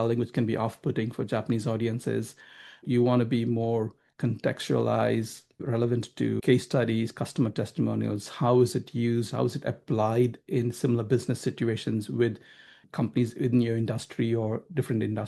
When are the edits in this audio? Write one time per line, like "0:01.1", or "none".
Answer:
0:02.8
0:05.7
0:12.8